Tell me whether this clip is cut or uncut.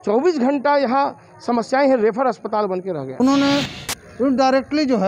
cut